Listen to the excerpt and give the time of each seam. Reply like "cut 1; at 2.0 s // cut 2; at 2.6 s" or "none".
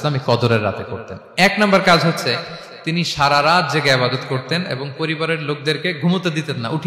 none